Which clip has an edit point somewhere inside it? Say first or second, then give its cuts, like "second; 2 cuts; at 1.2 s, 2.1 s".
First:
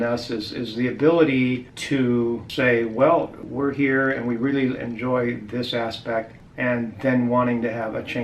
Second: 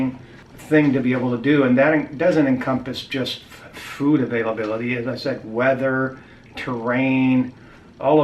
first; 4 cuts; at 1.7 s, 2.5 s, 3.4 s, 6.4 s